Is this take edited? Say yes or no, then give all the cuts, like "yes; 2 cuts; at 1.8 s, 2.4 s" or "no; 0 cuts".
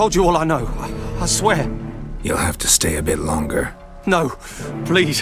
no; 0 cuts